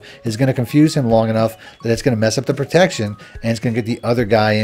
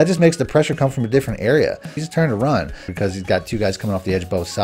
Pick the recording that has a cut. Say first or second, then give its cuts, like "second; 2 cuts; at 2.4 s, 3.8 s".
second; 2 cuts; at 2.0 s, 2.9 s